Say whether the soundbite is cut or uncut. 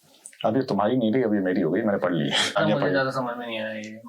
cut